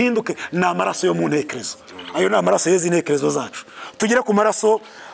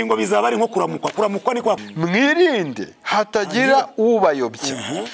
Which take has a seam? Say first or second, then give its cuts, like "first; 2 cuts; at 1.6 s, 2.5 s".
second; 1 cut; at 1.8 s